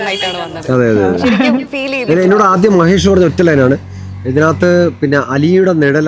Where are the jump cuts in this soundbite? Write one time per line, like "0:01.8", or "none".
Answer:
none